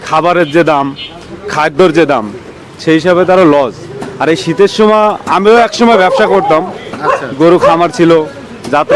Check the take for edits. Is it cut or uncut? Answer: uncut